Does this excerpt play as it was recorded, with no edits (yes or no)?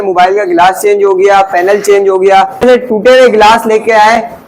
no